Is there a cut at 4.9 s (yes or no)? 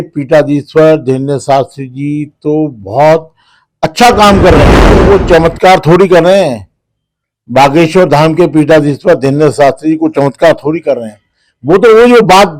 yes